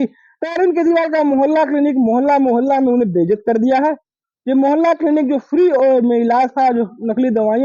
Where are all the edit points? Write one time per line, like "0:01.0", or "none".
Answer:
none